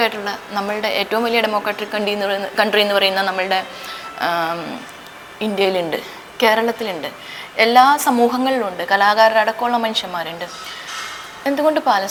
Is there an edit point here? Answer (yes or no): no